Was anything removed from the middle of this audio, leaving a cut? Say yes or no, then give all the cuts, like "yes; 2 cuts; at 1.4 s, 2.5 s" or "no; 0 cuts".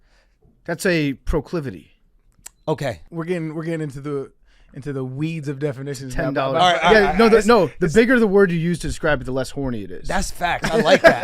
yes; 1 cut; at 3.0 s